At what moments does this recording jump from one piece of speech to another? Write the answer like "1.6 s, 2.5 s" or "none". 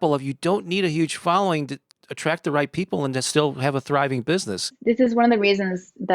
1.9 s, 4.8 s

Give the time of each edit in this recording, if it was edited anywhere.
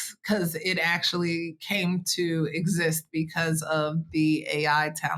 none

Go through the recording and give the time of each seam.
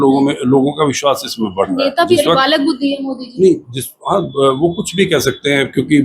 2.1 s

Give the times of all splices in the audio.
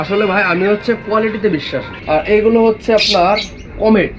1.9 s

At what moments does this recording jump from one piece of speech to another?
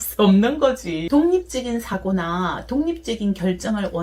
1.0 s

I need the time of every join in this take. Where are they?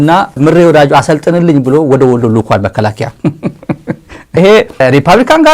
3.1 s, 4.3 s

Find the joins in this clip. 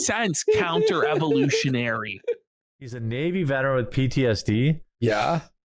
3.0 s

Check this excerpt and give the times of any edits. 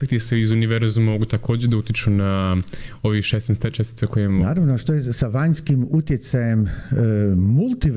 none

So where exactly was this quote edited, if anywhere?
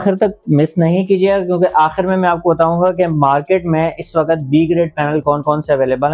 none

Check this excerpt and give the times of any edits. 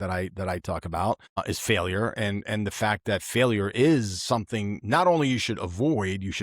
1.4 s

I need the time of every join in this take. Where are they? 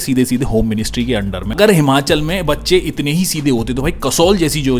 1.5 s

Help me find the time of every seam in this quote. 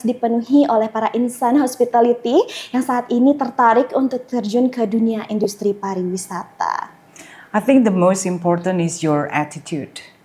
none

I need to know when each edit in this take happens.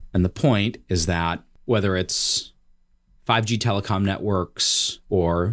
1.5 s

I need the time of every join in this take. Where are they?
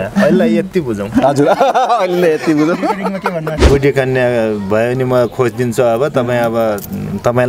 3.6 s

